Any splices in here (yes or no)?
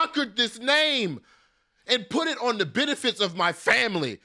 no